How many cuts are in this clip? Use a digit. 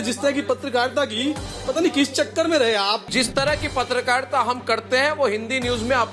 1